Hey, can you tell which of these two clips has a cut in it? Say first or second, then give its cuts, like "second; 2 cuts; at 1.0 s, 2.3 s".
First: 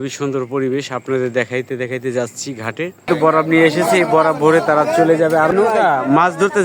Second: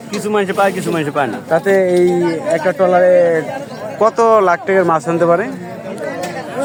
first; 2 cuts; at 3.1 s, 5.5 s